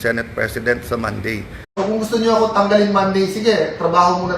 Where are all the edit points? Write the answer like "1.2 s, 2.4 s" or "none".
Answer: 1.6 s